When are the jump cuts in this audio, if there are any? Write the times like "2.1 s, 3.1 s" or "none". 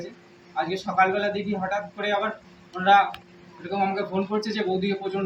none